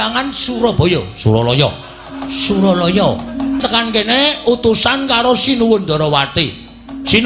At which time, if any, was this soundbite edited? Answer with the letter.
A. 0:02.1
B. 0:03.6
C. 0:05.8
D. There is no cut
B